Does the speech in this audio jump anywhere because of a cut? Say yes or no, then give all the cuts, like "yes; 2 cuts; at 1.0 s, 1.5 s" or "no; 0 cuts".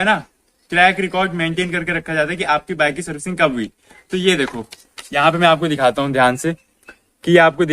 no; 0 cuts